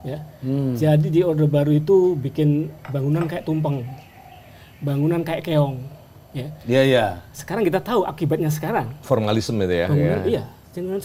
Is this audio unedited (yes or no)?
yes